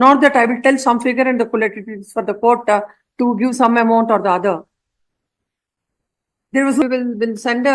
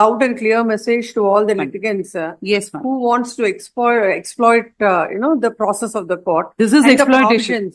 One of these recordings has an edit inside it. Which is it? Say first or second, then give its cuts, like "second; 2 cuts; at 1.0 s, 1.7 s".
first; 1 cut; at 6.8 s